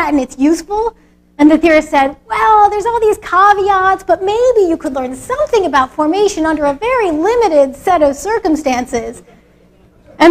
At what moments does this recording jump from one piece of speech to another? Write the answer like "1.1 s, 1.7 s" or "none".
7.3 s